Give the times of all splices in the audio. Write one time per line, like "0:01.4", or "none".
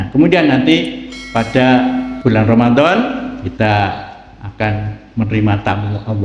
0:02.1
0:03.4